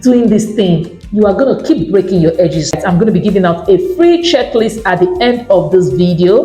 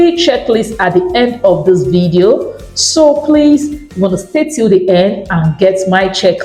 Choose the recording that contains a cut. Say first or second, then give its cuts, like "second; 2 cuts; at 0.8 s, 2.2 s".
first; 1 cut; at 2.8 s